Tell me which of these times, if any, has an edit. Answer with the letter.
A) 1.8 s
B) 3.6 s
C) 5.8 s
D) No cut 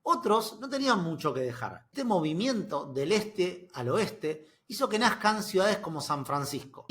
A